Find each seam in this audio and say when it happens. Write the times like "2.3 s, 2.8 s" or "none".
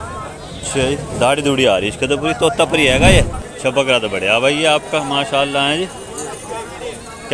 3.4 s